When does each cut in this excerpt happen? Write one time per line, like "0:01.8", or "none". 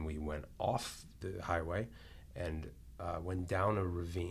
0:01.2